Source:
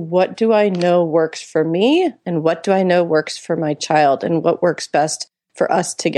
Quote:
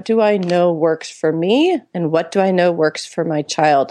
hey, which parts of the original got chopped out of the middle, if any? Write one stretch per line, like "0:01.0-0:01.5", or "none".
none